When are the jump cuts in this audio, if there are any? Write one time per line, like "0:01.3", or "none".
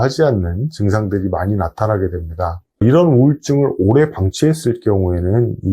0:02.7